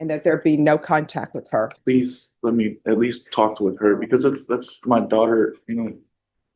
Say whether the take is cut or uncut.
cut